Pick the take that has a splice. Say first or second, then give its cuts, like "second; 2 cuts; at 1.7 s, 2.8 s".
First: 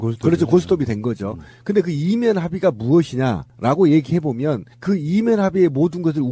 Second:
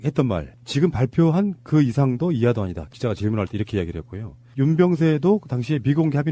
first; 1 cut; at 3.5 s